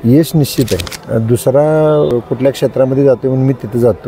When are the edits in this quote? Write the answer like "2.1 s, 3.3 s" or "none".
0.9 s, 2.1 s